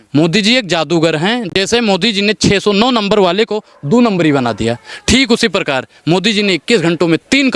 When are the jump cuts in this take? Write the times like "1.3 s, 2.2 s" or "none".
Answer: none